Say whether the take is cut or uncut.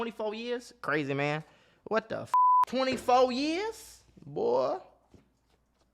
cut